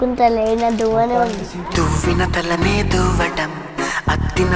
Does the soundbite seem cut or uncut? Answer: uncut